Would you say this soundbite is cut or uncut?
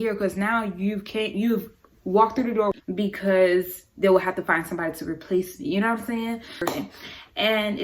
cut